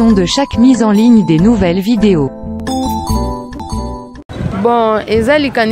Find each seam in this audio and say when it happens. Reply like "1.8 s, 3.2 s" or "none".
3.9 s